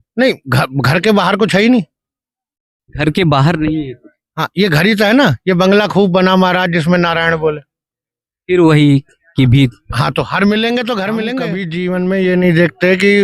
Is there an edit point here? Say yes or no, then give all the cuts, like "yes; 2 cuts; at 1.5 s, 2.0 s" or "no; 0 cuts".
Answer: yes; 1 cut; at 11.6 s